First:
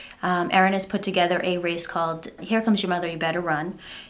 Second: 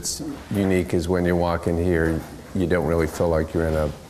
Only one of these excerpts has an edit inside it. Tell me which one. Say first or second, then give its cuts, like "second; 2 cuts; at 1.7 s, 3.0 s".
first; 1 cut; at 2.4 s